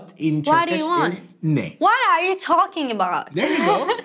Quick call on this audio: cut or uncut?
uncut